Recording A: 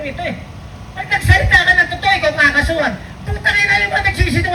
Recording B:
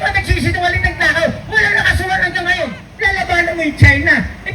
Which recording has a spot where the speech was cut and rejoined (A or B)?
B